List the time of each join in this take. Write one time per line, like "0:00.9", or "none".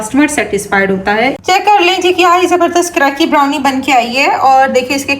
0:01.4